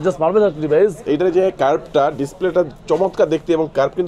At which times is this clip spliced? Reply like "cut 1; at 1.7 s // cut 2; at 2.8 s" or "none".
cut 1; at 1.0 s

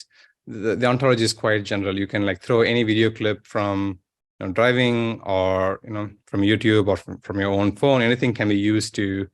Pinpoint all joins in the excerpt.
none

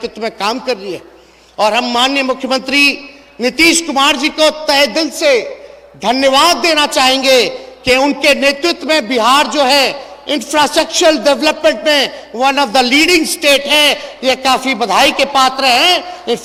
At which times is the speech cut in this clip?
none

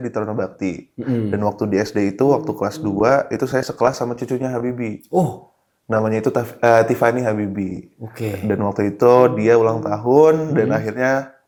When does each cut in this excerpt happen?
none

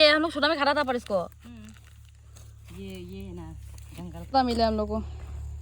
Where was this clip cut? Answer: cut 1; at 4.3 s

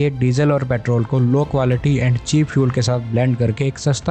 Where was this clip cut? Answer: none

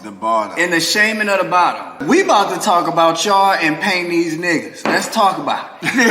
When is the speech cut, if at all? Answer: cut 1; at 2.0 s

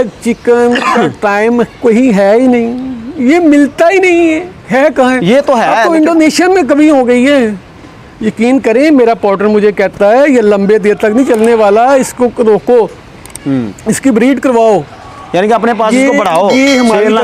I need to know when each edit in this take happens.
none

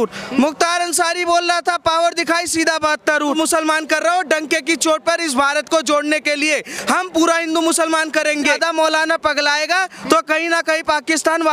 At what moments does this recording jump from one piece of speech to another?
cut 1; at 3.2 s // cut 2; at 8.5 s

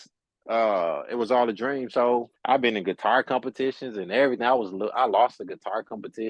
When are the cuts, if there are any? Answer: cut 1; at 2.3 s

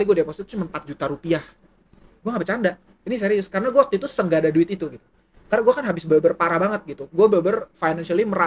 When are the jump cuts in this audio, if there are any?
none

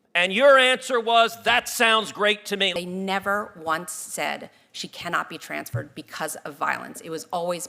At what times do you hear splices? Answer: cut 1; at 2.7 s

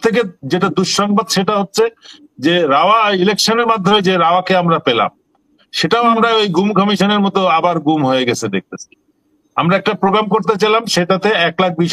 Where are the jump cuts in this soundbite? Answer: none

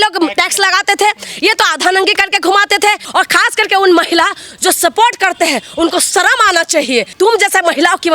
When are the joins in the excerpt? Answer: cut 1; at 3.0 s // cut 2; at 7.1 s

